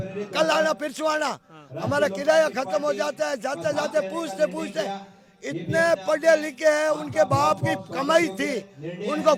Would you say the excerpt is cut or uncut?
uncut